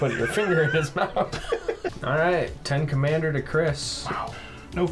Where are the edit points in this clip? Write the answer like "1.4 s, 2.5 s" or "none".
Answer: 1.9 s